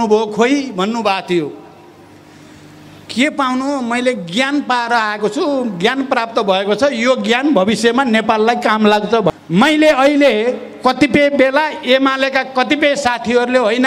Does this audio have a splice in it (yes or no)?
yes